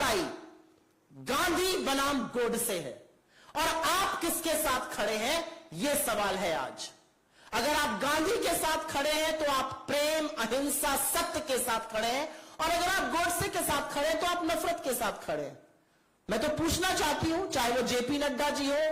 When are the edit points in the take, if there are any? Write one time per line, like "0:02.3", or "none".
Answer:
none